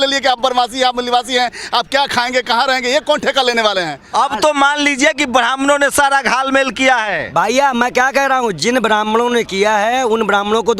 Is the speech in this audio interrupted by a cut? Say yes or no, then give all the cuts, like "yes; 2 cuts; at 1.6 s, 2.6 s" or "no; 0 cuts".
yes; 1 cut; at 4.0 s